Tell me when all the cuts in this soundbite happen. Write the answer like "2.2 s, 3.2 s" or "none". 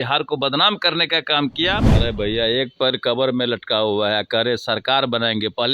1.9 s